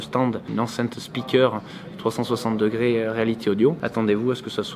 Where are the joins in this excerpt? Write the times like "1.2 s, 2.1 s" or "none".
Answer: 3.8 s